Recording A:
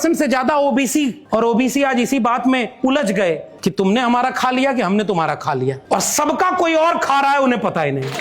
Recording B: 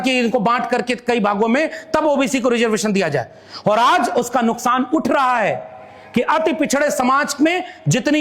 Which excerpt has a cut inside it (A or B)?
A